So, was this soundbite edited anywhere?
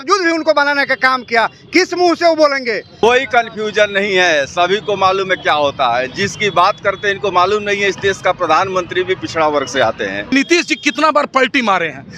yes; 2 cuts; at 3.0 s, 10.3 s

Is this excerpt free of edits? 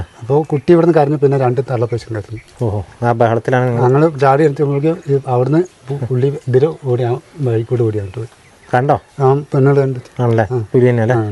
yes; 0 cuts

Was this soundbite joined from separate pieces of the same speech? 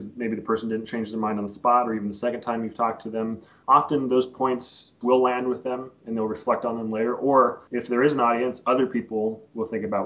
yes; 3 cuts; at 3.5 s, 4.9 s, 7.7 s

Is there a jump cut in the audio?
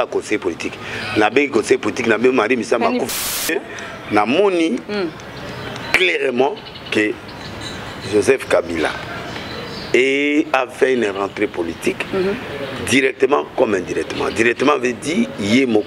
yes; 1 cut; at 3.5 s

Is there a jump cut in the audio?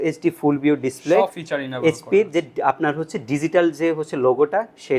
no; 0 cuts

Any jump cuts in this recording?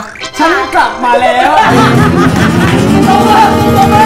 no; 0 cuts

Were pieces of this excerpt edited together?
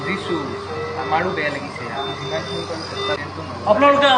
yes; 1 cut; at 3.2 s

